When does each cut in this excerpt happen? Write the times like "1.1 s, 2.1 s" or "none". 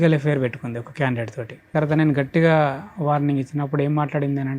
1.7 s